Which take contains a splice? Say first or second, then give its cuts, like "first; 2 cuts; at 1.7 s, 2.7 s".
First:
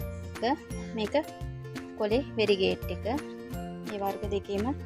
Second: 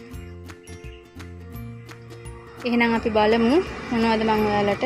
second; 1 cut; at 2.6 s